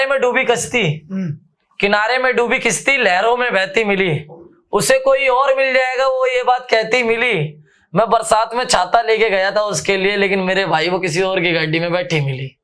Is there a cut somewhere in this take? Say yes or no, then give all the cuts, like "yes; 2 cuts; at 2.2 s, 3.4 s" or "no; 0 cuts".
no; 0 cuts